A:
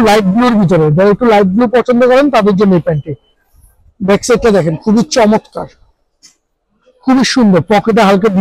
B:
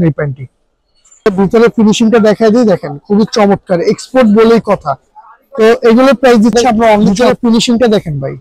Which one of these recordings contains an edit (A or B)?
B